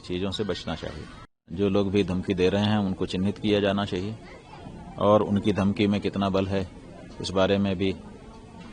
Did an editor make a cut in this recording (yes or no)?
yes